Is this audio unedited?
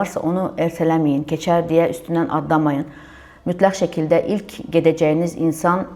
yes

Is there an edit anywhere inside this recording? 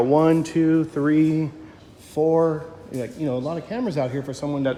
no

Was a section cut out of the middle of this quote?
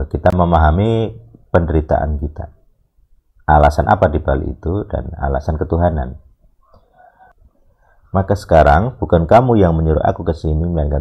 yes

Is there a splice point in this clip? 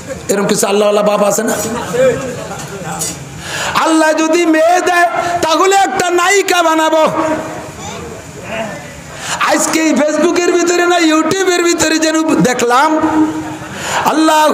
no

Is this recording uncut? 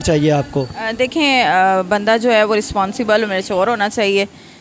yes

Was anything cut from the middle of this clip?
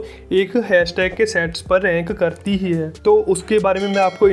no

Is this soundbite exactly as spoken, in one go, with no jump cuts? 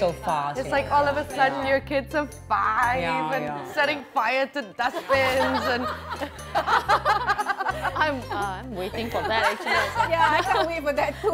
yes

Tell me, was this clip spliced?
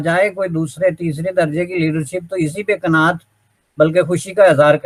no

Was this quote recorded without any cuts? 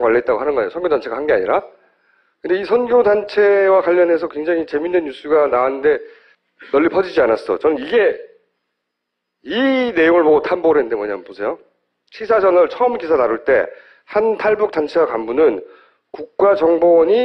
yes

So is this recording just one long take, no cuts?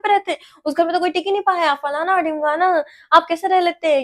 yes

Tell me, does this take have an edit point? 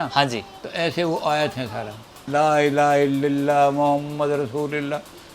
yes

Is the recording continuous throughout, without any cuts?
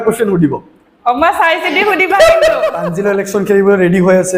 no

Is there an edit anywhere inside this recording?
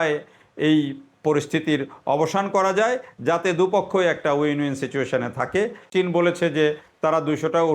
yes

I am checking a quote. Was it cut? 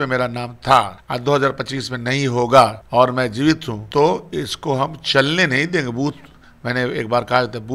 yes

